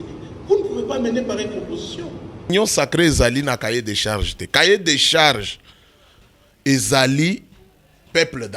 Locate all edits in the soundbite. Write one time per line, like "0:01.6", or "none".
0:02.5